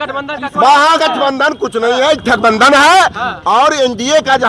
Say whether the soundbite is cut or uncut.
uncut